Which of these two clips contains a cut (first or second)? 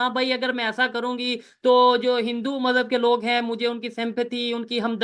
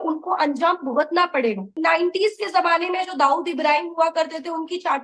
second